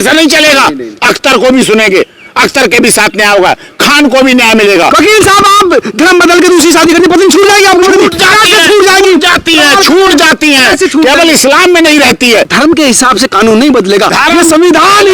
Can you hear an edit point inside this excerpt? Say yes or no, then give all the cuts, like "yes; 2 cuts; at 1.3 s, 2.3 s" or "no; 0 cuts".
yes; 2 cuts; at 4.9 s, 12.5 s